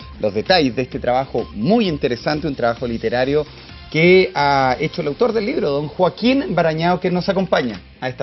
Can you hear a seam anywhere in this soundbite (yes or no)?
yes